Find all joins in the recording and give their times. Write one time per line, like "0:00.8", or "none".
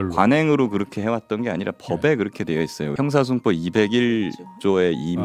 0:02.9